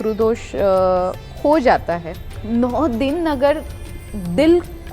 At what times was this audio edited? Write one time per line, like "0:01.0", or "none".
0:02.4